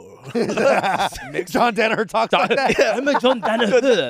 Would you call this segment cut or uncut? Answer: uncut